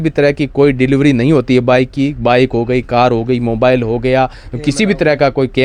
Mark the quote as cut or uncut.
uncut